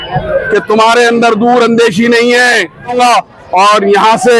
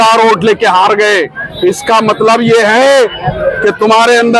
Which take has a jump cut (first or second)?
first